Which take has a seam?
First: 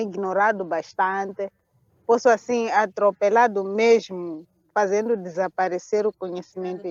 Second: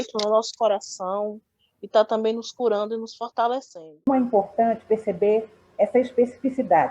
second; 1 cut; at 4.1 s

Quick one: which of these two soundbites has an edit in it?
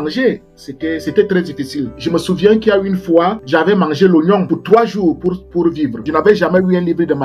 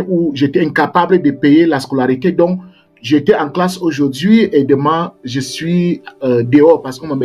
first; 4 cuts; at 2.0 s, 3.4 s, 4.5 s, 6.0 s

